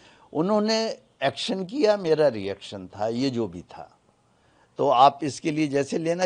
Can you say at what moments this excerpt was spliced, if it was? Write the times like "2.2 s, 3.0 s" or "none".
none